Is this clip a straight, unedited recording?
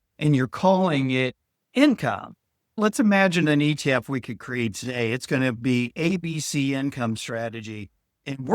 no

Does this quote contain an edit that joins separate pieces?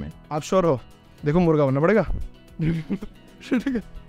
no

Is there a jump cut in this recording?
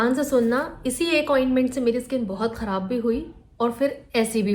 no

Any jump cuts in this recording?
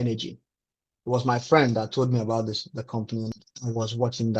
yes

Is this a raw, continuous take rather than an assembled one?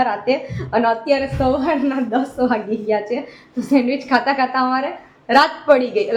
yes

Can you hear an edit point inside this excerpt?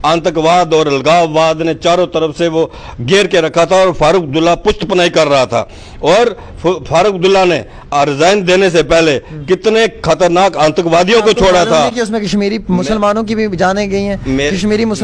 no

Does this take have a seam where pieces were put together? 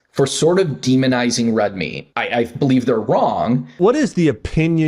yes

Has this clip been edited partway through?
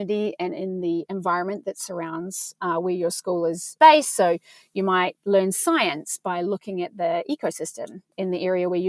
yes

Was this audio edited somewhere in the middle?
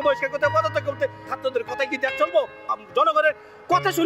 yes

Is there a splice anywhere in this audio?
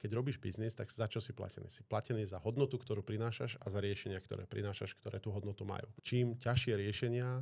yes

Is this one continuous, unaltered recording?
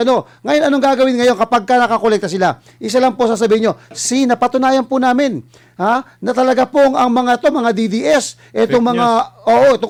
yes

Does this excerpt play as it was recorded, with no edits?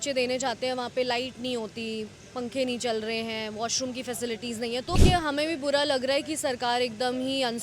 no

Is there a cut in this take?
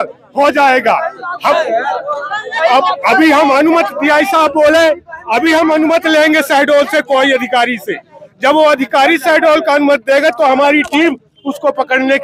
no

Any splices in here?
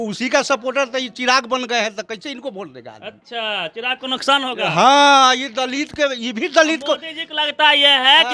no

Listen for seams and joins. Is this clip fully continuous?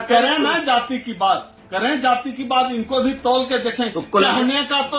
yes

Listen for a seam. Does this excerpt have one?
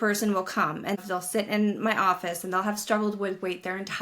yes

